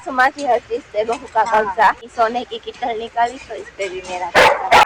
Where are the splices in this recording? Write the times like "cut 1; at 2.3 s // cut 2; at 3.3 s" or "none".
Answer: cut 1; at 2.1 s